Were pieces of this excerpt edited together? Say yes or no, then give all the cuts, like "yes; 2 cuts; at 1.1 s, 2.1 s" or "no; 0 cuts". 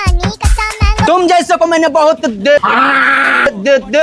no; 0 cuts